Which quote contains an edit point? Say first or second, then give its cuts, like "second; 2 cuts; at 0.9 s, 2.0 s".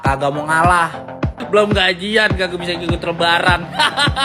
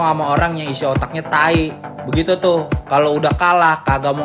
first; 1 cut; at 1.3 s